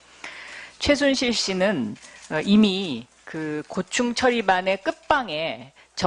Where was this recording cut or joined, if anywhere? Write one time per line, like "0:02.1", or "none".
0:03.2